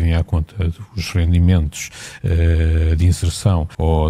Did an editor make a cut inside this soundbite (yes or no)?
no